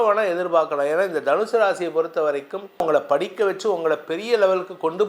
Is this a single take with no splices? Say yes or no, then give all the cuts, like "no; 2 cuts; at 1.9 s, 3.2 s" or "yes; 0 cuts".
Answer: no; 1 cut; at 2.8 s